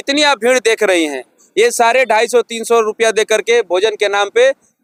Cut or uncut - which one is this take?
uncut